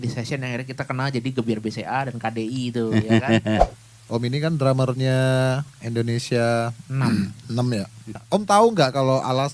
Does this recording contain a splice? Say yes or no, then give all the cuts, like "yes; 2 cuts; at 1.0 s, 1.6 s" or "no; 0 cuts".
yes; 2 cuts; at 3.8 s, 8.2 s